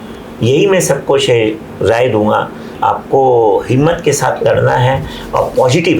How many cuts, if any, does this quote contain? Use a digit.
1